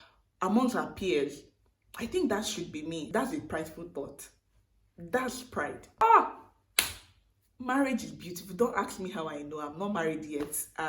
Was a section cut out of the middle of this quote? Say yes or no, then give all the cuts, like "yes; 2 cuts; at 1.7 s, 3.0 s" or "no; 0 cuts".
yes; 2 cuts; at 3.0 s, 6.0 s